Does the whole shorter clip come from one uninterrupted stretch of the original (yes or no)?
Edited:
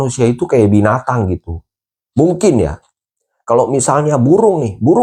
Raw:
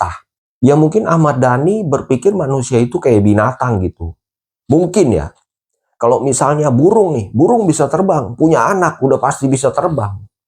yes